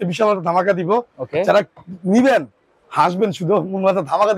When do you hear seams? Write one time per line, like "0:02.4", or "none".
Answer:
none